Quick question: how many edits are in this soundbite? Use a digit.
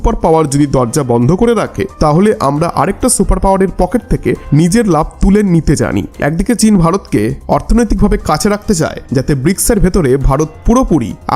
1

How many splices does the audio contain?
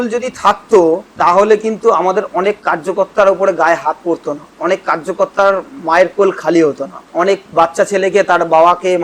3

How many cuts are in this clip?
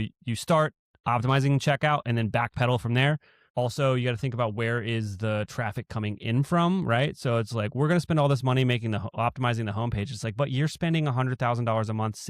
1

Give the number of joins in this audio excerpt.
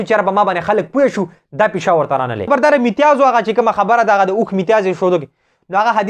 1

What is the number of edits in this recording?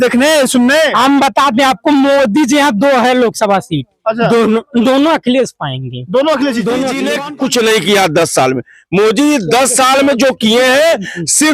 1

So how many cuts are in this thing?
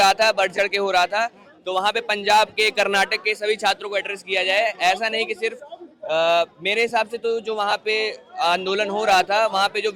0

